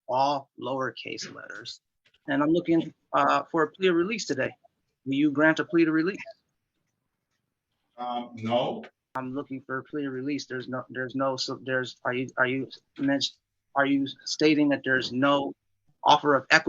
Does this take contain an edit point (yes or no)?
yes